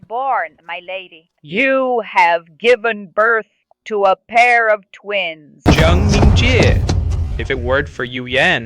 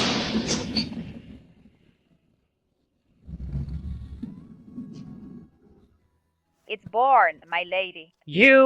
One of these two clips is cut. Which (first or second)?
first